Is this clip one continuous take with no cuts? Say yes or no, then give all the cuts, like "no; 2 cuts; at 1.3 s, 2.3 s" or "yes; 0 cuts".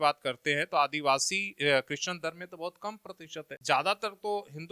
no; 1 cut; at 3.6 s